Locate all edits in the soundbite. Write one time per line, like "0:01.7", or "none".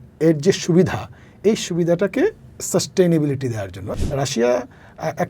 0:03.9